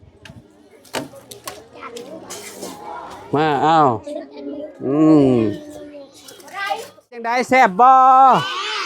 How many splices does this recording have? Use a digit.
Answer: 1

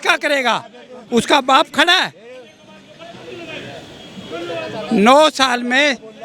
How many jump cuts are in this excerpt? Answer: 0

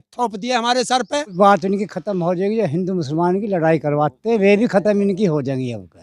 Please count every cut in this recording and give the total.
1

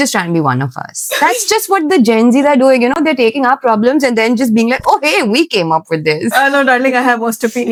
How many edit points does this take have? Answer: 0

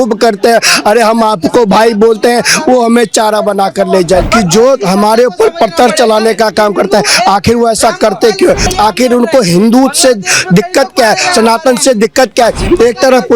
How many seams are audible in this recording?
2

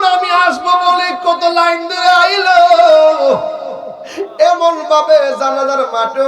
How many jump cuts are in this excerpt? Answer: 0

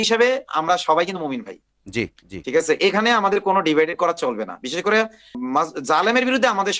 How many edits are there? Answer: 1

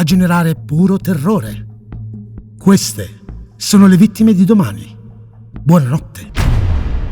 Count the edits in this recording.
1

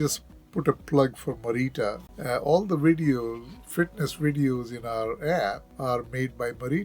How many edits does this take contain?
2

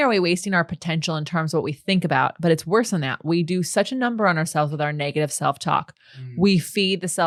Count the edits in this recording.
0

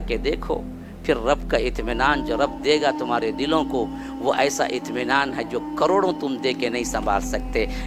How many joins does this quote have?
0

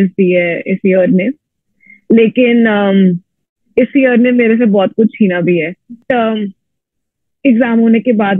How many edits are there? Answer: 1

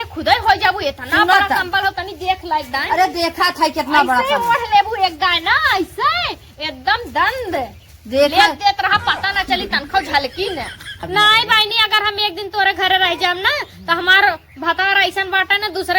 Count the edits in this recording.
1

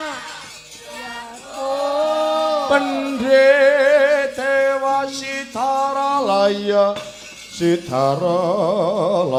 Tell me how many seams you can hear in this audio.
0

